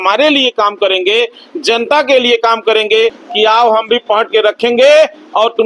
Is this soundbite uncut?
no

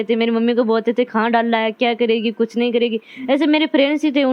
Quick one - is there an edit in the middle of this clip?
no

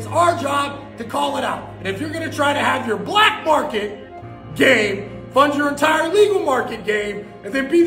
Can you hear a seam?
no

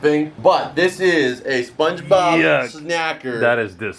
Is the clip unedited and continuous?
yes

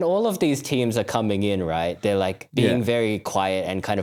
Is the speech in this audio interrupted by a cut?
no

